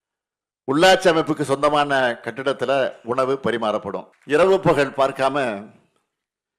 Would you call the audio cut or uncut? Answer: cut